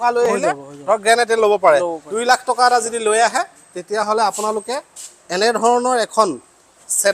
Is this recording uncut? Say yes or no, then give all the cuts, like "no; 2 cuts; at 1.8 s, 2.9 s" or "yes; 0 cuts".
no; 1 cut; at 2.0 s